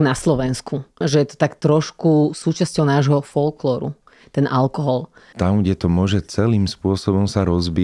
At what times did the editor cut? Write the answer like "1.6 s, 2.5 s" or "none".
1.0 s, 5.2 s